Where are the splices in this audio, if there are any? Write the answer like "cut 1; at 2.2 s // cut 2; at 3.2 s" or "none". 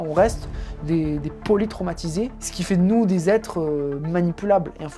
cut 1; at 2.5 s